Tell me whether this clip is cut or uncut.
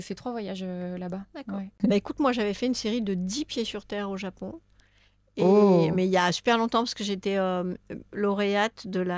cut